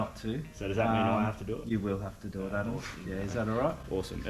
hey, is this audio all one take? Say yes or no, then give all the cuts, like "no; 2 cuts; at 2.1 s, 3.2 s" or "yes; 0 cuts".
yes; 0 cuts